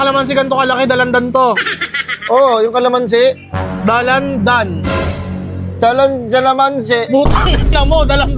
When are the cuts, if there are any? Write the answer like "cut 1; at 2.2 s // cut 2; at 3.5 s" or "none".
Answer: none